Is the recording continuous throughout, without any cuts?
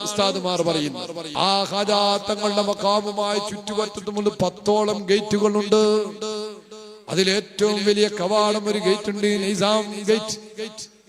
no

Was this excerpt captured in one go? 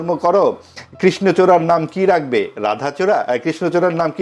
yes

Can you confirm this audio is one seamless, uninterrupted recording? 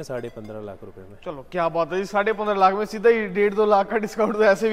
yes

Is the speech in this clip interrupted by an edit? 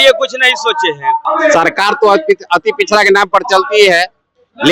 yes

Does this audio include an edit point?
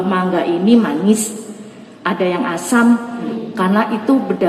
yes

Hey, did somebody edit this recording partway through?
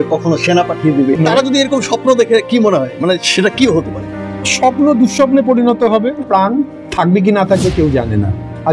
yes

